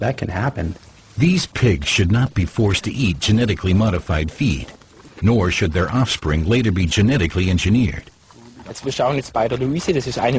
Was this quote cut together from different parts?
no; 0 cuts

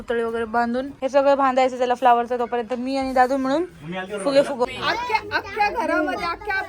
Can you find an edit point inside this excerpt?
yes; 2 cuts; at 0.9 s, 4.7 s

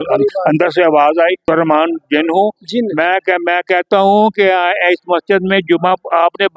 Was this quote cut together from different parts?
yes; 1 cut; at 1.4 s

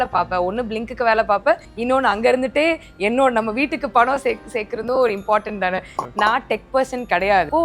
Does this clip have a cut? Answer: no; 0 cuts

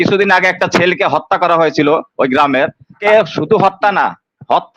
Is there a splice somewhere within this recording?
yes; 1 cut; at 3.0 s

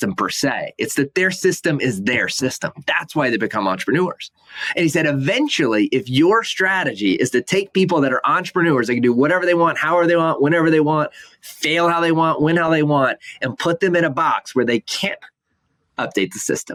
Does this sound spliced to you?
no; 0 cuts

